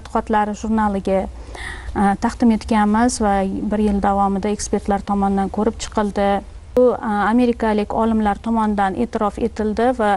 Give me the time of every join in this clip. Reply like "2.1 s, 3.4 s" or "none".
6.8 s